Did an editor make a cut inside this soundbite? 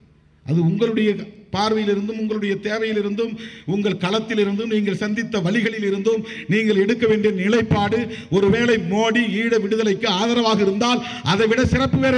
no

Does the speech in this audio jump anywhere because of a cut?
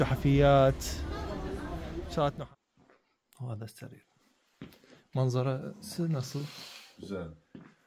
yes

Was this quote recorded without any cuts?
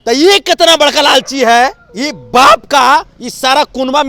yes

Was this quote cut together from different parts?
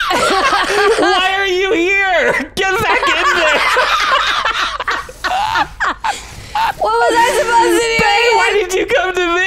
no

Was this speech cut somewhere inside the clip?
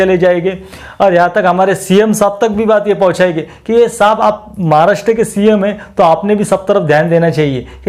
no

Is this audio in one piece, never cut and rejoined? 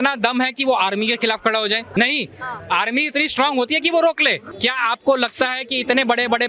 no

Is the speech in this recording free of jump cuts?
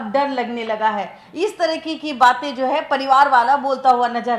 yes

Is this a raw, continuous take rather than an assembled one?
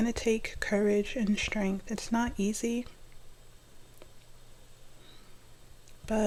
yes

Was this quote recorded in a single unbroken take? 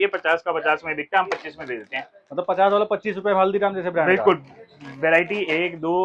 yes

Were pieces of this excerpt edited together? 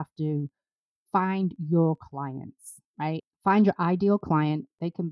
yes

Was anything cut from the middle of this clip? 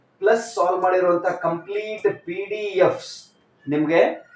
no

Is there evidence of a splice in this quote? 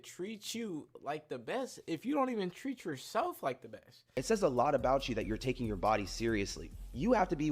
yes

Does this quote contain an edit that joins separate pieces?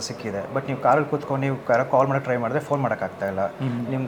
no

